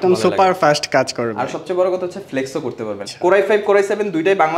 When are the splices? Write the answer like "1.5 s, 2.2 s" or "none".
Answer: 3.0 s